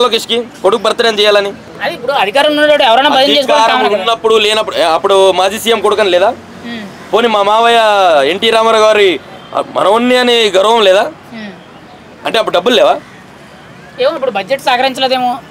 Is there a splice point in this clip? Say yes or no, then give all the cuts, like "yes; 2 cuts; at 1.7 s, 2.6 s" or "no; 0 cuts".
no; 0 cuts